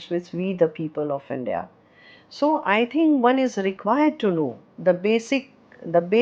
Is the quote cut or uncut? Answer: uncut